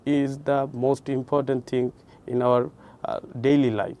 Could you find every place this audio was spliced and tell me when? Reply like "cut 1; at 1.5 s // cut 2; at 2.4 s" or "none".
none